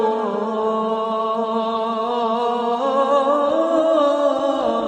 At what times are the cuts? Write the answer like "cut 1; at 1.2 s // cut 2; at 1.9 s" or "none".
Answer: cut 1; at 3.7 s